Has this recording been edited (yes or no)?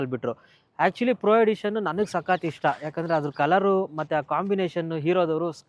no